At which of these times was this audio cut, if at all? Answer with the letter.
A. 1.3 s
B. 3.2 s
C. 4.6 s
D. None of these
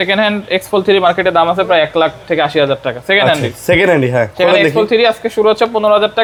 D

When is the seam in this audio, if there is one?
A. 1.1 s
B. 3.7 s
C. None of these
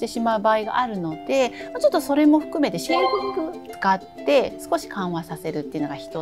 B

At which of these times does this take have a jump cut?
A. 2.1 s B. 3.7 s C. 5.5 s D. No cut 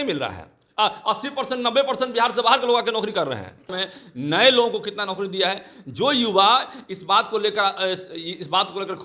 B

